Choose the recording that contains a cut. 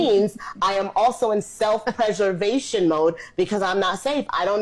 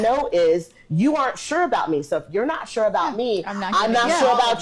first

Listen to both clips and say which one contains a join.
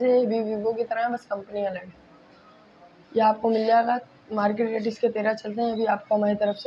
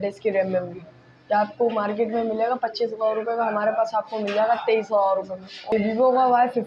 second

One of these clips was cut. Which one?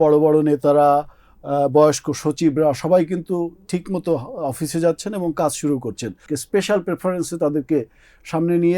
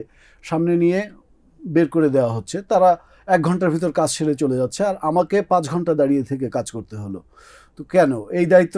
first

